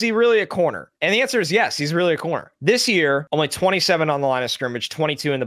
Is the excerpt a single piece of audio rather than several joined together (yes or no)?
no